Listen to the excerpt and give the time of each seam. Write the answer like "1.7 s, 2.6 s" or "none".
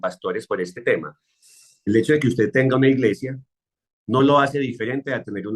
none